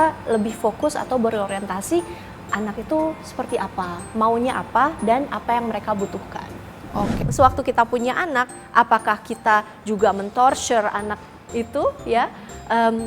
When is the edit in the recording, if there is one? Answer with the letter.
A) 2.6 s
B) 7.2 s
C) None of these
B